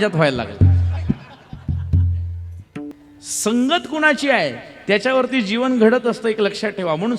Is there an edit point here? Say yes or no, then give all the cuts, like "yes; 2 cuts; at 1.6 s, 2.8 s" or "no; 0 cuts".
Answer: yes; 1 cut; at 2.9 s